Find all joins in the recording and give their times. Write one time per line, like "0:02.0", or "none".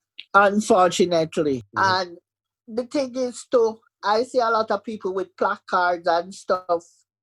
0:01.7

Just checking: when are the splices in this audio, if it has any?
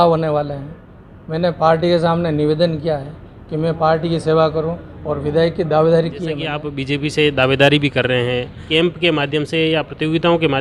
0:06.7
0:08.7

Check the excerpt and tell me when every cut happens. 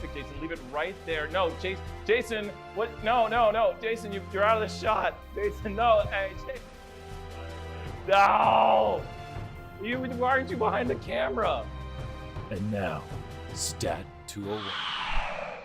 0:14.7

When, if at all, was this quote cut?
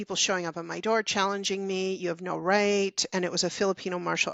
none

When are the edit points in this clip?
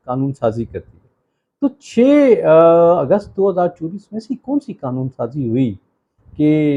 none

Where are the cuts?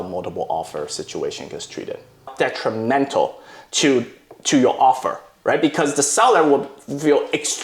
0:02.3

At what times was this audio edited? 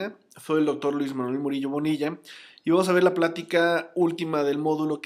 none

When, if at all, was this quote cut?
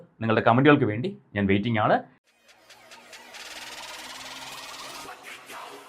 0:02.1

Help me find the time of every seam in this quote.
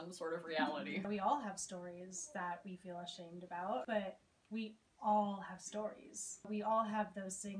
0:01.1
0:03.8
0:06.5

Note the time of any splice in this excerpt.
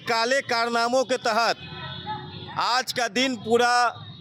none

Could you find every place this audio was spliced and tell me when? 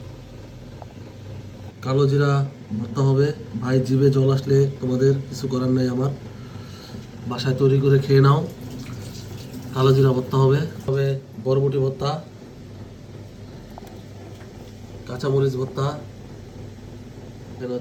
none

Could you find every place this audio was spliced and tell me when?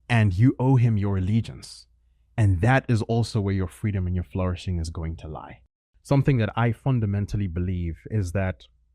0:05.6

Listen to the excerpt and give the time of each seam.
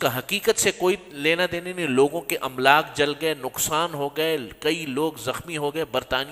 none

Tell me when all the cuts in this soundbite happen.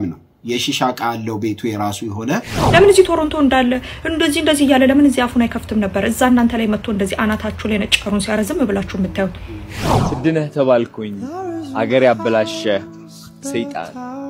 0:02.5
0:09.9

